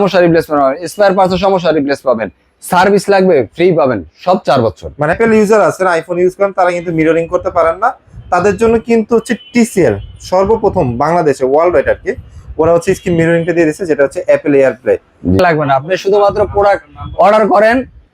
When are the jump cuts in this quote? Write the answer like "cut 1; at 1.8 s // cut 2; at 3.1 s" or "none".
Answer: cut 1; at 5.1 s // cut 2; at 15.4 s